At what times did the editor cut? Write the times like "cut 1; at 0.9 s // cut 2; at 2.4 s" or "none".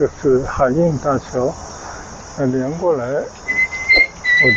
none